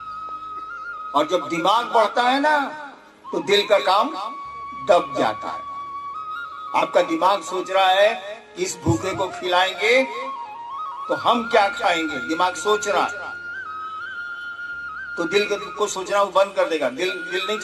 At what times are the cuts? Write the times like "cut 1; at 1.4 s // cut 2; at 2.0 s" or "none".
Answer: cut 1; at 1.1 s